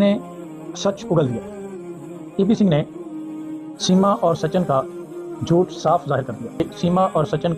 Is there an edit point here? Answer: yes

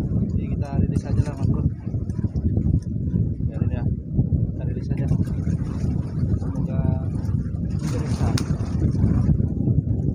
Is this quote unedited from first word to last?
yes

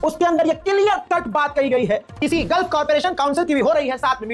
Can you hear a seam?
yes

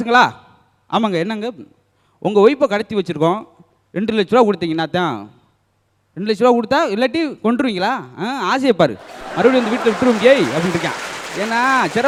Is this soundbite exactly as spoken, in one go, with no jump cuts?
yes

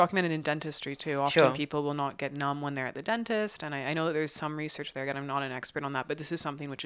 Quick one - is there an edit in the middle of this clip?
no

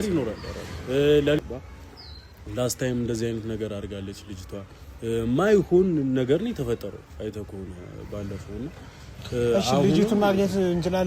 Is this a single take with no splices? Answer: no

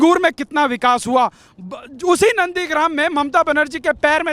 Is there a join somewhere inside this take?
no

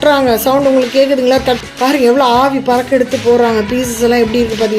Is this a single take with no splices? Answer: no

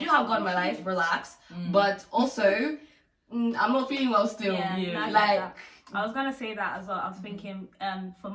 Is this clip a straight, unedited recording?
yes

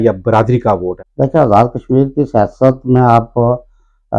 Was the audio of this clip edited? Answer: no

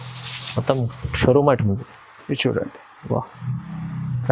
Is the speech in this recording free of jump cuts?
yes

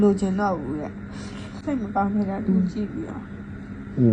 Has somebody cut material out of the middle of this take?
yes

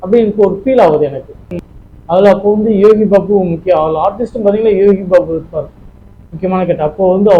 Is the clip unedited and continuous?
no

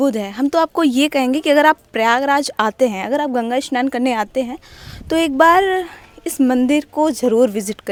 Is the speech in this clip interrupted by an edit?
no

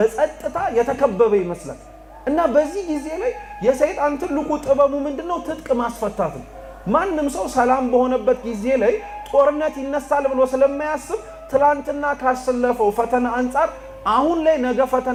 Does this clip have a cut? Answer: no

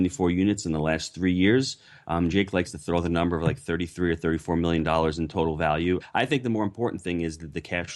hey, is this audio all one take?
no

